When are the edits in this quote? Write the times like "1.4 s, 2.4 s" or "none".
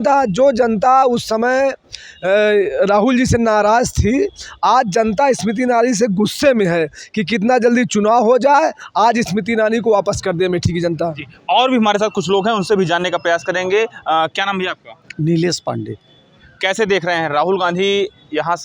none